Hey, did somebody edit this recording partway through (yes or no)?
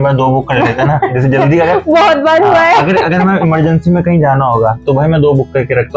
no